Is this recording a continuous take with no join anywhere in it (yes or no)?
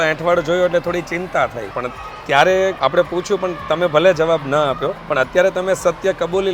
no